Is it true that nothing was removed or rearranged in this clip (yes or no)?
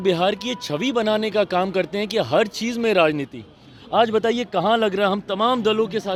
yes